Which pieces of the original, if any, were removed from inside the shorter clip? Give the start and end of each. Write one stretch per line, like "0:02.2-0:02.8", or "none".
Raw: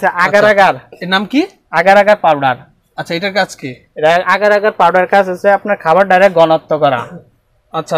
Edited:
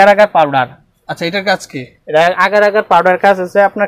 none